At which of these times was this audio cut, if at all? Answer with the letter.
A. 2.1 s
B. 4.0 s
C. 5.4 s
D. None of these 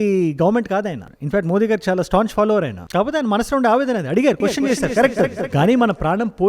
C